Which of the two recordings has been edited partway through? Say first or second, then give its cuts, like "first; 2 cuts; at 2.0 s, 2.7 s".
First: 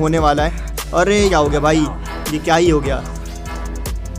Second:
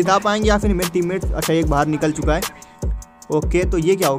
first; 1 cut; at 1.3 s